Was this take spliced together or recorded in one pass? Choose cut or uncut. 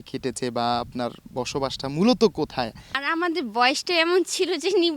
cut